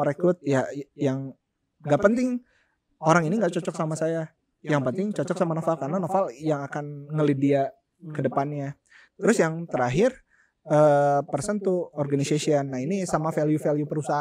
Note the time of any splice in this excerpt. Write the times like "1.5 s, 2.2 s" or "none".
none